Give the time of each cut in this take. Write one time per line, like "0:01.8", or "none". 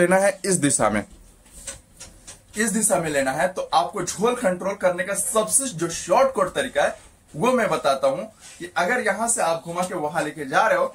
none